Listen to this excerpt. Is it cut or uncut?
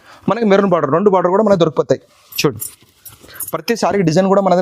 uncut